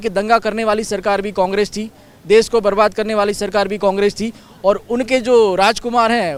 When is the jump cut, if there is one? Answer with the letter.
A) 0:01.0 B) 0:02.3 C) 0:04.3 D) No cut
D